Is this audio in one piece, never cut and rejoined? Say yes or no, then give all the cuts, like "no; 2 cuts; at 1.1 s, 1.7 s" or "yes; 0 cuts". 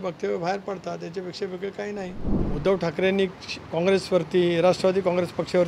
no; 1 cut; at 2.3 s